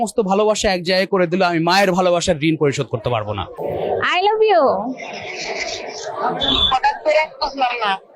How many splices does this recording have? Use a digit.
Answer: 1